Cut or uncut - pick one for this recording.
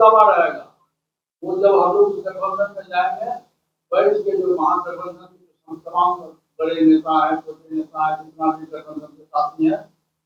uncut